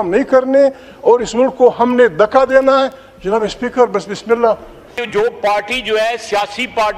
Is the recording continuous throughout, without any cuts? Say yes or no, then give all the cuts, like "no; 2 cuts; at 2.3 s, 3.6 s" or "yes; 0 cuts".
no; 1 cut; at 4.8 s